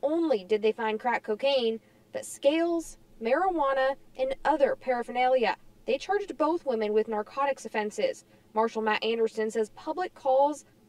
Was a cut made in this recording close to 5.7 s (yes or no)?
yes